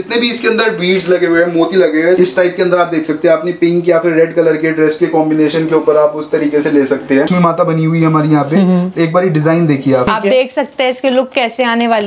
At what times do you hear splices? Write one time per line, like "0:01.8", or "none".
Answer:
0:02.2
0:07.3
0:10.0